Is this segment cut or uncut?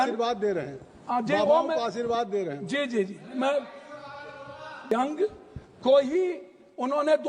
cut